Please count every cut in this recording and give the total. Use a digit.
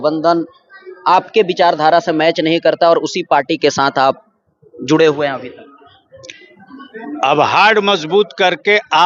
0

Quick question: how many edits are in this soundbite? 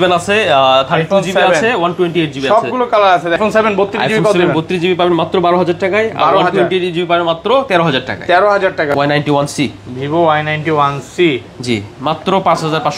2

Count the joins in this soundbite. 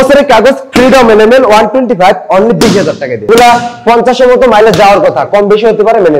1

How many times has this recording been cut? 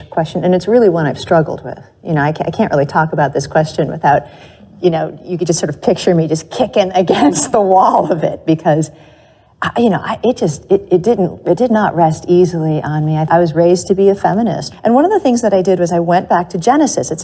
2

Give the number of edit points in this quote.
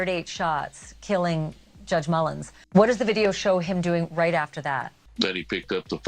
2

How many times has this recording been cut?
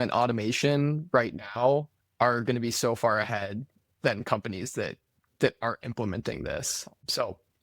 1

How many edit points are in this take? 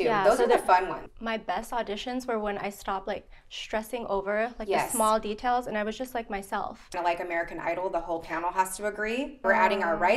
3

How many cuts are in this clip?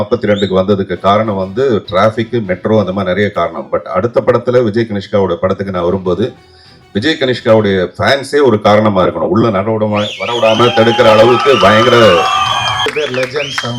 1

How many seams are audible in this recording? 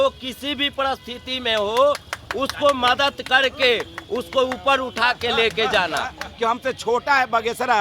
1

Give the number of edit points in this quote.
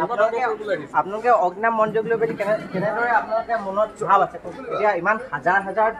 1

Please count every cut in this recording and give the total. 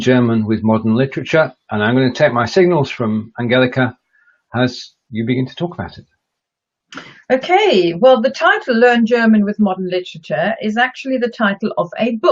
1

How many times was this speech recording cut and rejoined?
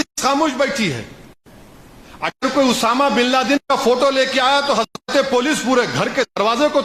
0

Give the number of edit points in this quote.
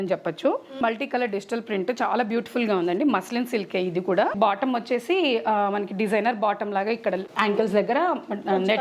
3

